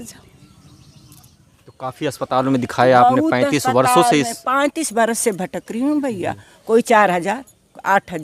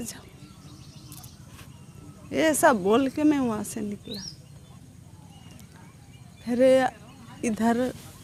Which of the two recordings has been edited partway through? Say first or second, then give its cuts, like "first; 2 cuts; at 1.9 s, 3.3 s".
first; 1 cut; at 1.5 s